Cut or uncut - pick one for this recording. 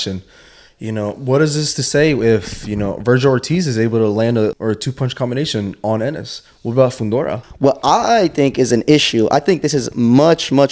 cut